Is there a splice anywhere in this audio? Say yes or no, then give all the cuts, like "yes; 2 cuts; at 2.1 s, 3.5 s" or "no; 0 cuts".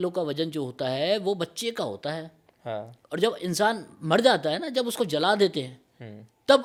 no; 0 cuts